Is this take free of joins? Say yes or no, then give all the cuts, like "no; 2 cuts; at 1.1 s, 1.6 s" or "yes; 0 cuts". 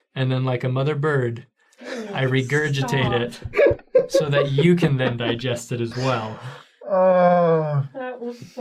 no; 1 cut; at 6.7 s